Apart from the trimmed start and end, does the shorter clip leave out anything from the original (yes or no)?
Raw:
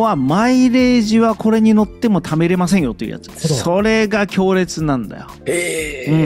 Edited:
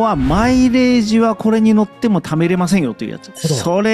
no